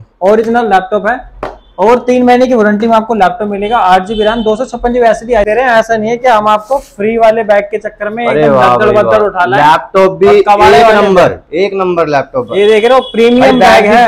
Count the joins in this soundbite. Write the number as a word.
one